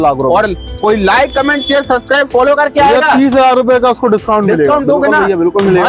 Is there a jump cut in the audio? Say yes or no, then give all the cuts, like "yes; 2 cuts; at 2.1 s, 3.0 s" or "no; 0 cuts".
no; 0 cuts